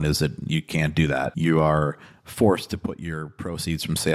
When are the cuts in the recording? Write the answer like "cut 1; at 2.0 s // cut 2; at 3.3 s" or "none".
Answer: cut 1; at 1.3 s